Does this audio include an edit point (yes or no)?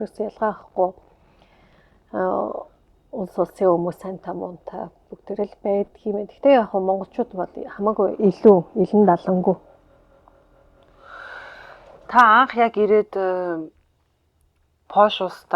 no